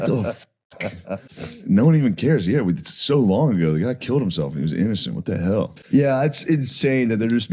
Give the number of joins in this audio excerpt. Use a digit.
1